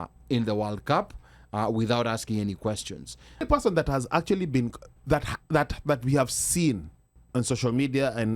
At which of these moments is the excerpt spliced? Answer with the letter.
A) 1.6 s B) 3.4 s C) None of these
B